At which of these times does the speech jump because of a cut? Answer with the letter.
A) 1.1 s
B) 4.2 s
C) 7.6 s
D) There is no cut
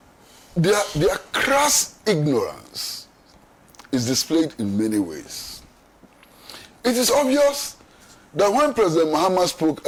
D